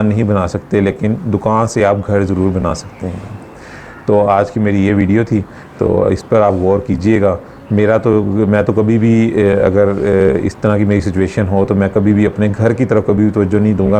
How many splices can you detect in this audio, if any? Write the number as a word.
zero